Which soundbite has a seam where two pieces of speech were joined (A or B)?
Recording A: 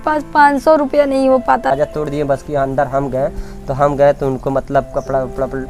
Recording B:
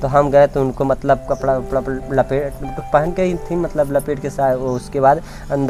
A